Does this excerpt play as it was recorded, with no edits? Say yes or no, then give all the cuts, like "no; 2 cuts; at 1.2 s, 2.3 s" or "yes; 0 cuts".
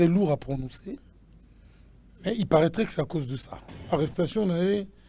no; 1 cut; at 3.8 s